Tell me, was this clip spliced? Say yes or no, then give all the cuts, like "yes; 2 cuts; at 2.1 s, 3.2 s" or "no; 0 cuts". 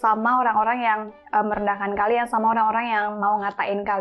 no; 0 cuts